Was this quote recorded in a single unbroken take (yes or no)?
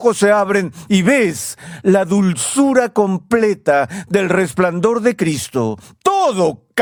yes